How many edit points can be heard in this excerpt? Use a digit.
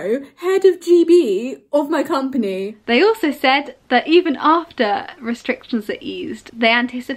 1